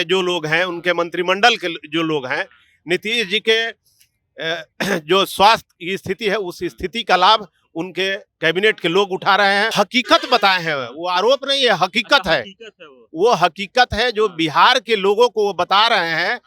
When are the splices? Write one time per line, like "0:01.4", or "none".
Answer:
0:09.7